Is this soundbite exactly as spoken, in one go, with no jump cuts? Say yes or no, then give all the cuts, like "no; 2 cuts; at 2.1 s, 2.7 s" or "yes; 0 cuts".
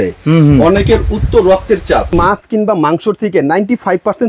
no; 1 cut; at 2.1 s